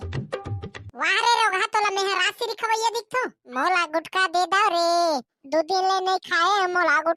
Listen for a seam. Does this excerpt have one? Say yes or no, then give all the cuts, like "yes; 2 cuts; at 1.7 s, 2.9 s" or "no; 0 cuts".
yes; 1 cut; at 3.4 s